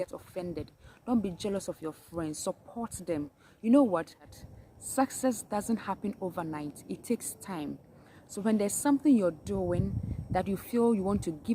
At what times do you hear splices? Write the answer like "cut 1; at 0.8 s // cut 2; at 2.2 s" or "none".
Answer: cut 1; at 4.2 s